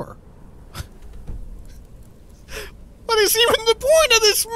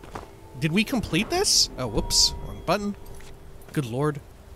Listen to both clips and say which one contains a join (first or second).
first